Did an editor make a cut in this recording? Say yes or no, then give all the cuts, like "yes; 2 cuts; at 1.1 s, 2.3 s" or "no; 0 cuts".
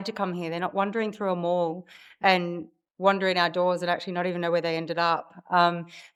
no; 0 cuts